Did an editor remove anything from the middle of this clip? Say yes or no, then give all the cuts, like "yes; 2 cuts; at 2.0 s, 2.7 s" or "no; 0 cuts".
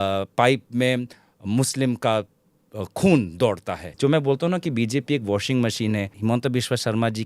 yes; 2 cuts; at 3.9 s, 6.1 s